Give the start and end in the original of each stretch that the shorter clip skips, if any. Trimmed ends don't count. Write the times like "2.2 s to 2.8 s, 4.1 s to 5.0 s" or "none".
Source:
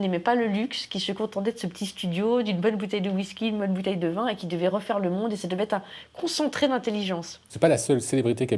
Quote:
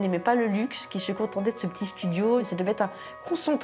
2.5 s to 5.4 s